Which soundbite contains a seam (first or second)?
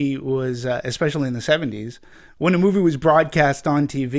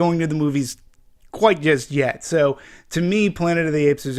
second